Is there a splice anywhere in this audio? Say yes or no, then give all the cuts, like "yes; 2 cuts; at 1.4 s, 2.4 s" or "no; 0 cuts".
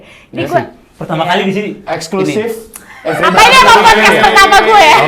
no; 0 cuts